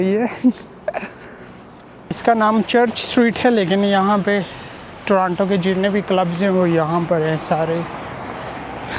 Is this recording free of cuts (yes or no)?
no